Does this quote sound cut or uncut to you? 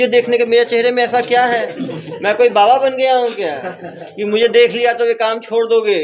uncut